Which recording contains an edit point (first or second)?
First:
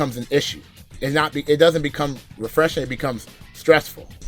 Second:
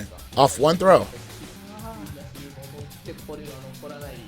second